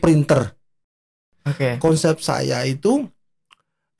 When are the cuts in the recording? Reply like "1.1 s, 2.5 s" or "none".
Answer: 1.1 s